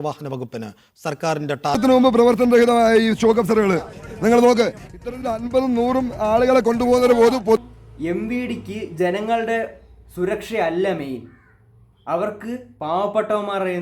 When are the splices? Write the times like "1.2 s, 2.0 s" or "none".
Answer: 1.8 s, 7.6 s